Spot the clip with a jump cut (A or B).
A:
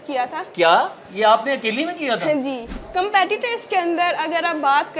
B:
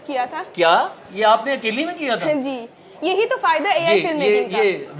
A